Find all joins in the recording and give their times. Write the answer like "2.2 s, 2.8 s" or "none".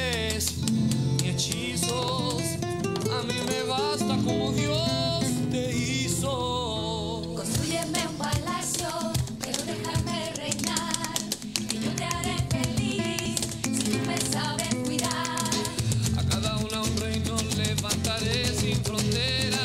none